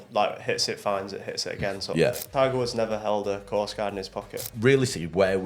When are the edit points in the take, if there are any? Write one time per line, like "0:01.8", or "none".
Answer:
0:02.2
0:04.4